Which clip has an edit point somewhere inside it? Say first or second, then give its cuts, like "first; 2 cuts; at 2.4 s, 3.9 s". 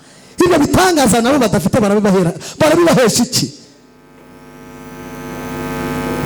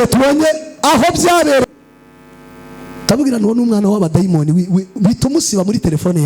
second; 1 cut; at 1.8 s